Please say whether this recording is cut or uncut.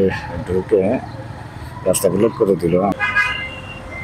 cut